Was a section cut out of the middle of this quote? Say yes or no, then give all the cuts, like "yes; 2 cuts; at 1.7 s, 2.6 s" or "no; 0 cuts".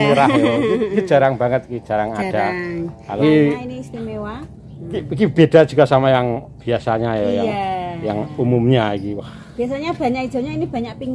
yes; 1 cut; at 3.2 s